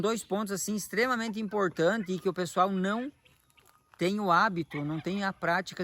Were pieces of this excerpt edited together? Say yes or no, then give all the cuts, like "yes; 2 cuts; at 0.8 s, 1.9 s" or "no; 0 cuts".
no; 0 cuts